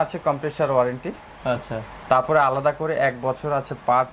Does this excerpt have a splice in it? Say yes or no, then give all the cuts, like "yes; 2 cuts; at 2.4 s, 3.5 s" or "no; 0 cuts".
no; 0 cuts